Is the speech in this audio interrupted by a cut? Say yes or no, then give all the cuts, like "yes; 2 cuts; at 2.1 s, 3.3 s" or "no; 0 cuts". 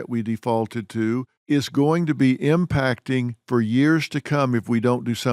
yes; 1 cut; at 1.3 s